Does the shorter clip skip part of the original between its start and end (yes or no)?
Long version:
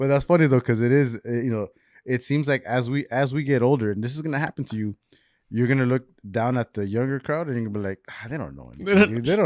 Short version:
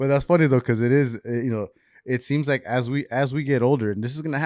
no